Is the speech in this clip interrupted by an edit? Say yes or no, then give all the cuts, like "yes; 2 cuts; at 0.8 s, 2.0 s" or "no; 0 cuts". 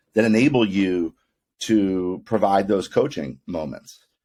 no; 0 cuts